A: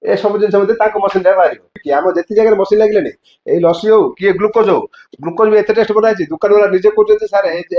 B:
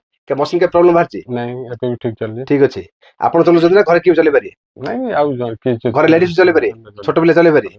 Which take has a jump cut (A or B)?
A